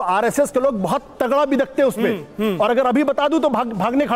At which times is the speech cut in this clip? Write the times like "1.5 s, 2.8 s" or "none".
none